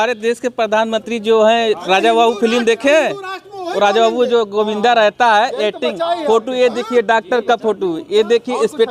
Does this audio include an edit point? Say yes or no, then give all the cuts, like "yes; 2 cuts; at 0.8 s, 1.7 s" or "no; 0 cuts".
no; 0 cuts